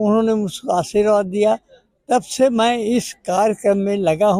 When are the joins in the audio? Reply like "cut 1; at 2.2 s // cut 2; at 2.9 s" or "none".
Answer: none